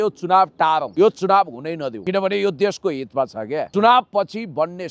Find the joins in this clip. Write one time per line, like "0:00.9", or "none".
0:00.9
0:02.0
0:03.7